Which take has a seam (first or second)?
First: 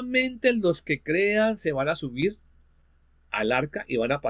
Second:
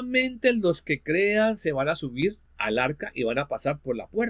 second